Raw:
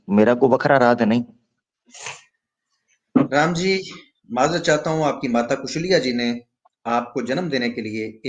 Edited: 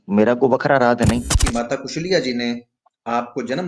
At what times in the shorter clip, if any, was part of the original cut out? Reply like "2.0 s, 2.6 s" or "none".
1.4 s